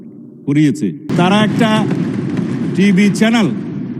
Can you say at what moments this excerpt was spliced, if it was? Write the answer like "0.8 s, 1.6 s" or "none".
1.1 s